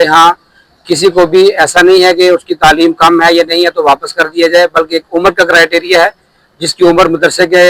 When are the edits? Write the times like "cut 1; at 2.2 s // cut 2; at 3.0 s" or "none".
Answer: none